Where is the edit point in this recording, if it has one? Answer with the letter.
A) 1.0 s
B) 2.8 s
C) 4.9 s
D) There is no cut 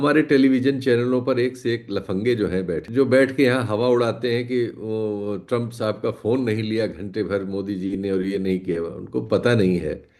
B